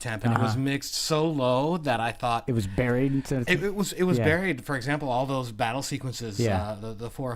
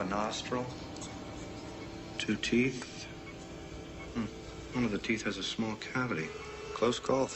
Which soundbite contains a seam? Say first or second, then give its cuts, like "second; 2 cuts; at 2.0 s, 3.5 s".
first; 1 cut; at 2.3 s